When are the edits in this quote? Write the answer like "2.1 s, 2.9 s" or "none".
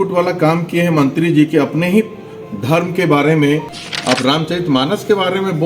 3.7 s